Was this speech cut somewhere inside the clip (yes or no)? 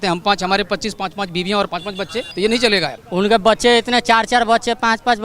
yes